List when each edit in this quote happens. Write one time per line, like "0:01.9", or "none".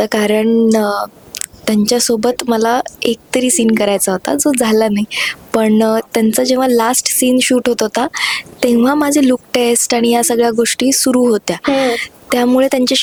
none

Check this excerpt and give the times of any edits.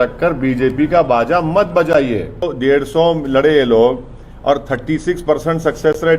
0:02.4

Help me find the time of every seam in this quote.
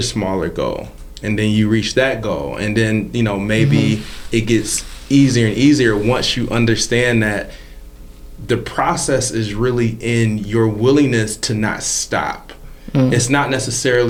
none

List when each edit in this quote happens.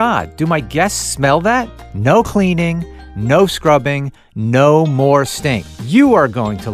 0:01.8
0:05.7

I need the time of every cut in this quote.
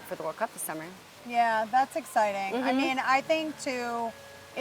none

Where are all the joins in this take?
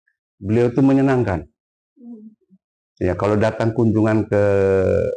none

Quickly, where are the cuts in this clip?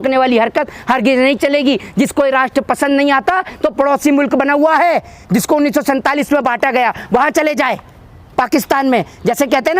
none

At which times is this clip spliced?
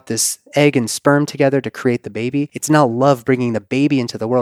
0:02.5

